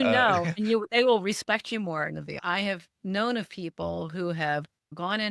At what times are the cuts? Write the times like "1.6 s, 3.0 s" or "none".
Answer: 2.3 s